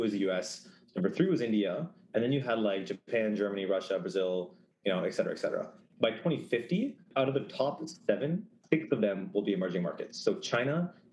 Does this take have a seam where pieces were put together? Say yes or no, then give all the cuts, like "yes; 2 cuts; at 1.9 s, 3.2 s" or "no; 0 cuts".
yes; 3 cuts; at 5.9 s, 7.0 s, 8.6 s